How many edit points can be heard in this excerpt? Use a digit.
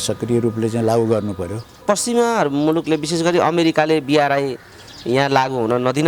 1